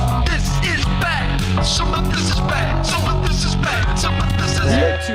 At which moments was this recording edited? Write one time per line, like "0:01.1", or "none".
none